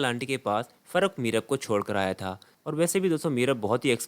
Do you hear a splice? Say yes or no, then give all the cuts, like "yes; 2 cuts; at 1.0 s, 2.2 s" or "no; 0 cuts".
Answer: yes; 1 cut; at 2.5 s